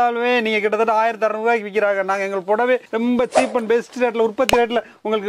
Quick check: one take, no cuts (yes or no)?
yes